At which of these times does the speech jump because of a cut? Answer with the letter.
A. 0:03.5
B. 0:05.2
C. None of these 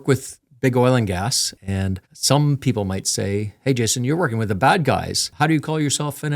B